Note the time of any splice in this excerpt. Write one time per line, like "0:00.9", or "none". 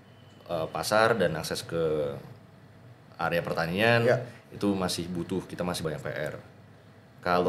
0:05.8